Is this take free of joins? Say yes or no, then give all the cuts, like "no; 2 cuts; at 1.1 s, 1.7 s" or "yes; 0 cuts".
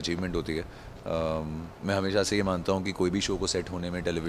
yes; 0 cuts